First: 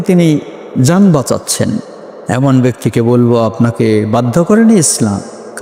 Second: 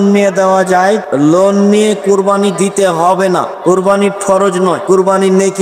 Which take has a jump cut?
second; 3 cuts; at 1.0 s, 3.5 s, 4.8 s

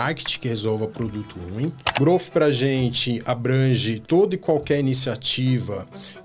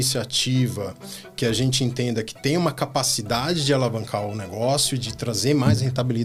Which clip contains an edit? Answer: first; 2 cuts; at 1.3 s, 4.0 s

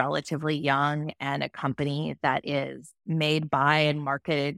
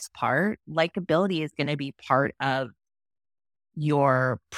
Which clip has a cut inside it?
first; 1 cut; at 2.9 s

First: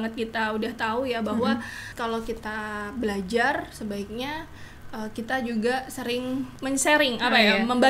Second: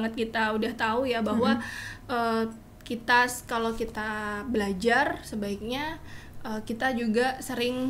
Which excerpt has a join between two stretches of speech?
first; 2 cuts; at 1.9 s, 6.5 s

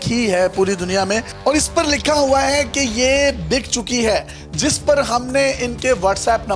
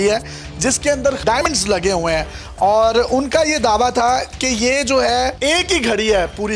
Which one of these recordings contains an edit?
second; 2 cuts; at 1.4 s, 5.4 s

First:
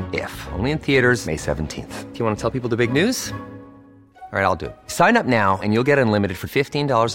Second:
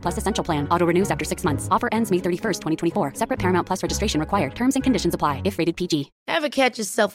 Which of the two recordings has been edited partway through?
second; 1 cut; at 6.1 s

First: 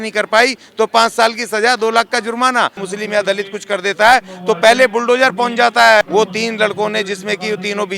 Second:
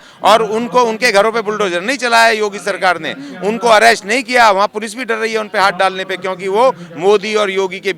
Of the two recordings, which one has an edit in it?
first; 2 cuts; at 2.8 s, 6.0 s

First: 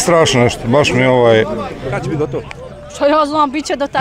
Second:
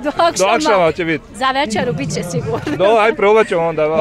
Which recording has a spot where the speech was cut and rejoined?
first; 1 cut; at 2.0 s

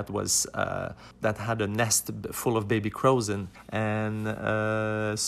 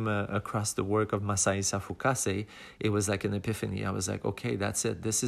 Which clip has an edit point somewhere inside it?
first; 2 cuts; at 1.0 s, 3.6 s

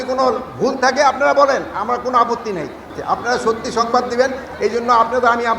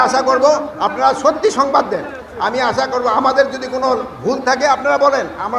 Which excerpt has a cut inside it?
first; 1 cut; at 2.9 s

